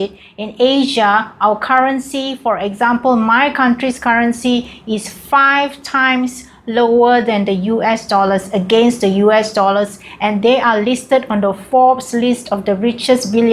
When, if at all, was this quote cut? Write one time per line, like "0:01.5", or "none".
none